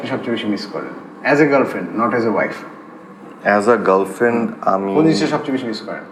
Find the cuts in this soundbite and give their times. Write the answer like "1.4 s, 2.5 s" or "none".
none